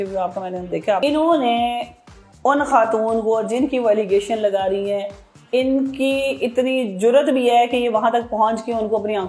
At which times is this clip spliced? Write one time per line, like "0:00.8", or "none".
0:01.0